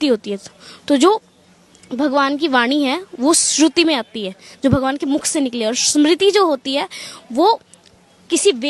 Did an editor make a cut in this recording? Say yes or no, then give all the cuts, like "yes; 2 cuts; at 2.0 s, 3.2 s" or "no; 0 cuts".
no; 0 cuts